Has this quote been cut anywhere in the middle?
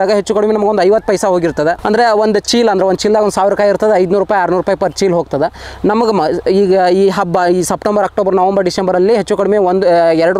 no; 0 cuts

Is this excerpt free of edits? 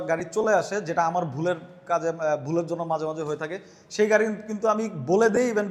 yes; 0 cuts

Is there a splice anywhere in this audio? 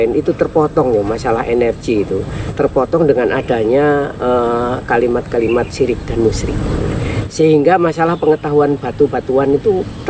no; 0 cuts

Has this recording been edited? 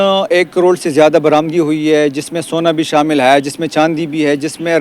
no; 0 cuts

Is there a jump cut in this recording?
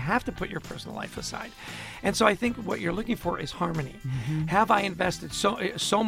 no; 0 cuts

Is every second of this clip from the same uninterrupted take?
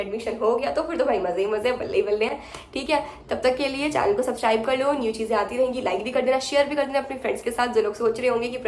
yes; 0 cuts

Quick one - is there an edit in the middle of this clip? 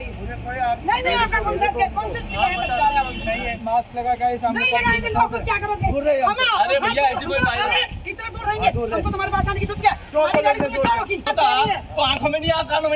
yes; 1 cut; at 11.3 s

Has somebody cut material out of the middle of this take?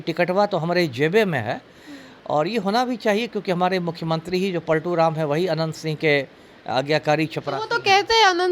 no; 0 cuts

